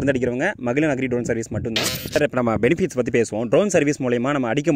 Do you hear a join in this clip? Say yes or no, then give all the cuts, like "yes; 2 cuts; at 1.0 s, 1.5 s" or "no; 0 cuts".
yes; 1 cut; at 2.2 s